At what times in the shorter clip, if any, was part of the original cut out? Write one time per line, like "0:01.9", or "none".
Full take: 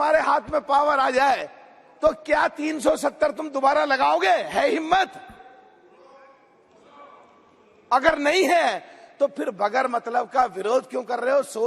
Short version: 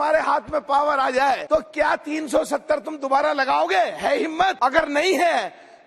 0:01.4
0:04.6

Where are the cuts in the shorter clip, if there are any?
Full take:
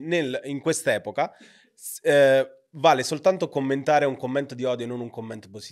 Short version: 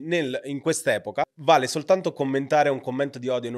0:01.3

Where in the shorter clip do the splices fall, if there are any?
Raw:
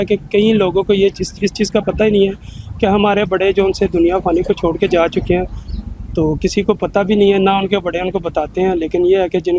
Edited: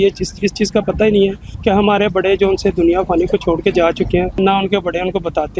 0:01.5
0:04.4

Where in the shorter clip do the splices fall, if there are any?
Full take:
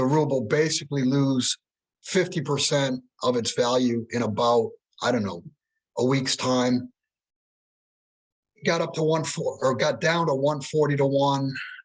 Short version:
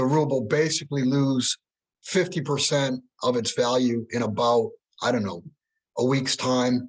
none

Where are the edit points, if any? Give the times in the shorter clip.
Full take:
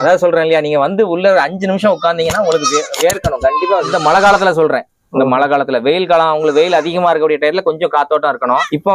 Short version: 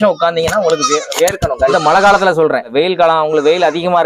0:01.7
0:02.7

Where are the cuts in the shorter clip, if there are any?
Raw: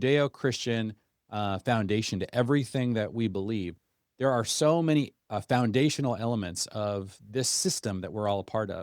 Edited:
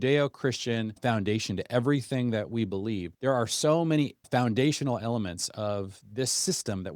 0:01.0
0:03.1
0:04.2

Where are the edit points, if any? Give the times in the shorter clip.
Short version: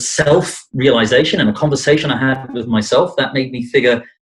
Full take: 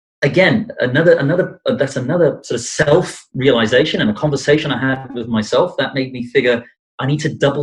none

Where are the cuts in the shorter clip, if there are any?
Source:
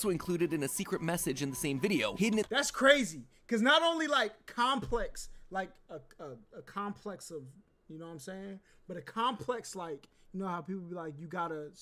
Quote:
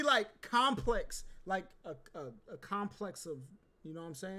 none

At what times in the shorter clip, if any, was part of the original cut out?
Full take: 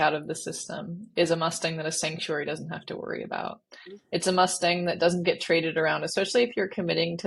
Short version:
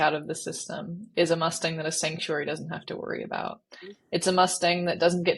none

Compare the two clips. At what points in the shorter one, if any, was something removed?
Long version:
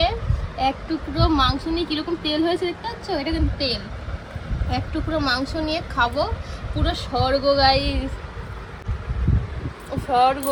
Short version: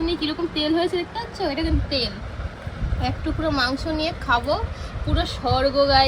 none

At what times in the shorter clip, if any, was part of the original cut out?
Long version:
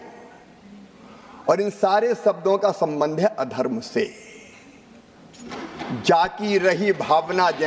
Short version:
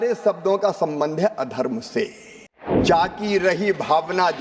0:02.8

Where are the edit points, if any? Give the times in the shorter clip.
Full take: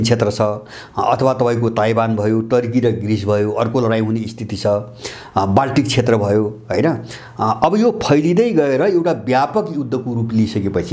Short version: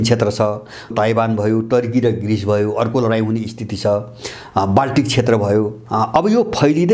0:00.9
0:05.8

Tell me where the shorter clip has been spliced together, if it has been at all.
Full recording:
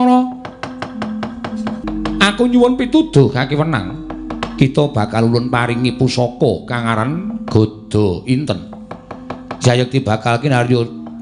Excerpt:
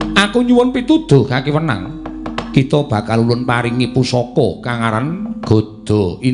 none

